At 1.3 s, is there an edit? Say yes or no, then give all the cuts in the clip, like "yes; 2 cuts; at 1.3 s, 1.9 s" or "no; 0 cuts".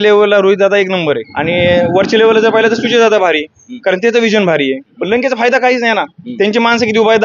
yes; 2 cuts; at 1.3 s, 4.9 s